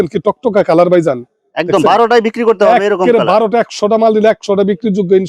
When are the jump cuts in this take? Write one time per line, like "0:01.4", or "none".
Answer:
none